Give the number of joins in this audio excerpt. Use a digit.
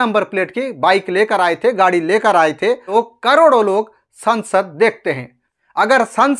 1